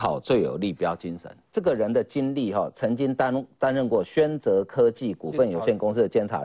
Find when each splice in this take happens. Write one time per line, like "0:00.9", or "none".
0:01.3